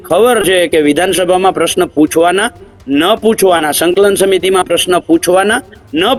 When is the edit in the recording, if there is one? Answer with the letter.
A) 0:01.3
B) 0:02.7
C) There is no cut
C